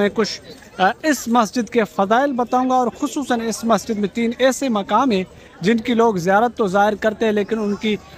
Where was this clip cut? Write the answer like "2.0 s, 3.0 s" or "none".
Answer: none